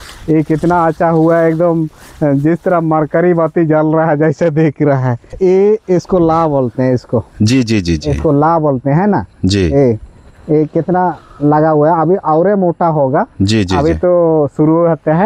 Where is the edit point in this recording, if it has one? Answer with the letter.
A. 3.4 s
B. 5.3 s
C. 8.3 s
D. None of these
B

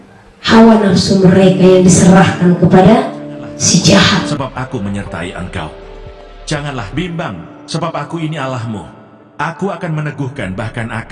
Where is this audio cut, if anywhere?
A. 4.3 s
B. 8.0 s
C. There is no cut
A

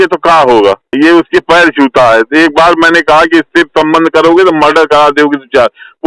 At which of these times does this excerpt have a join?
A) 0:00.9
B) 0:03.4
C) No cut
A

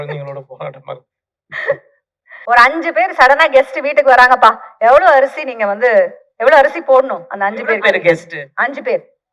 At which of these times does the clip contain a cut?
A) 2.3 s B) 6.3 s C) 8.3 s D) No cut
A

